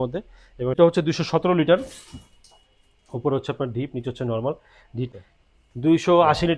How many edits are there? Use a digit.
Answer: 2